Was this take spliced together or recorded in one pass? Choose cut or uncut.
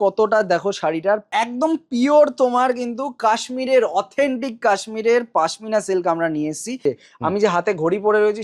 cut